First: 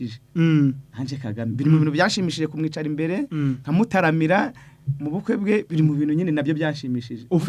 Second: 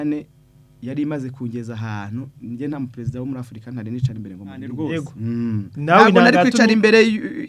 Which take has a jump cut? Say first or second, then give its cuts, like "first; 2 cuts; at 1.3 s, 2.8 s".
second; 1 cut; at 4.7 s